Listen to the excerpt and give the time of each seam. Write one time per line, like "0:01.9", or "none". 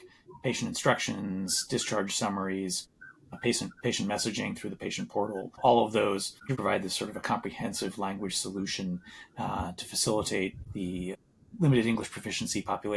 0:06.5